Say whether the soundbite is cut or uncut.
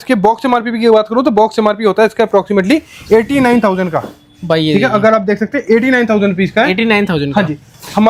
uncut